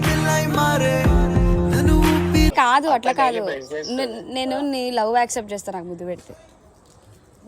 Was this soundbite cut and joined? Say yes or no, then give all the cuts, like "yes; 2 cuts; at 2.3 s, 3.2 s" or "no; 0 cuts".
yes; 1 cut; at 2.5 s